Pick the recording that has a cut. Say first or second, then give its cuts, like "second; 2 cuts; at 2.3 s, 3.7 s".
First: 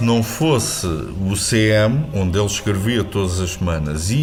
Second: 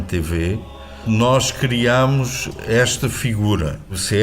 second; 1 cut; at 1.0 s